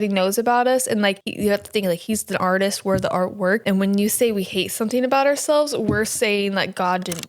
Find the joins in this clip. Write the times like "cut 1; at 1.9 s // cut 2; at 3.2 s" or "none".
cut 1; at 1.3 s // cut 2; at 3.6 s